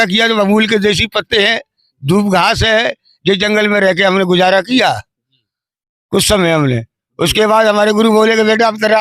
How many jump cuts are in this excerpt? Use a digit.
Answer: 0